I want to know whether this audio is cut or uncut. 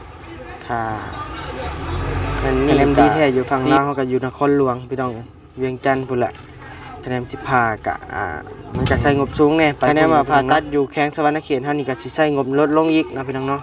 cut